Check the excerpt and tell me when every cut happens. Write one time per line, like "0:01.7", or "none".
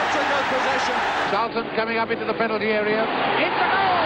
0:01.3
0:03.1